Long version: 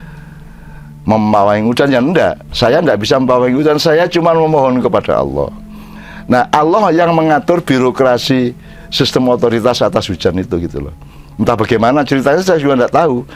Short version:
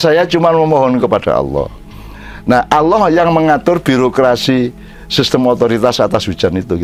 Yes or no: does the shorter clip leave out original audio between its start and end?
no